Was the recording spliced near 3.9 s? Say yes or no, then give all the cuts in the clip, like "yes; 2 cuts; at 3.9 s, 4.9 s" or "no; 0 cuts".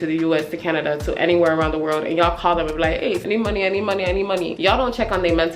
no; 0 cuts